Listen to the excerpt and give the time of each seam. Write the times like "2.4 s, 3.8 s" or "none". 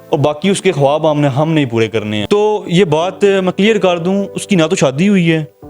2.2 s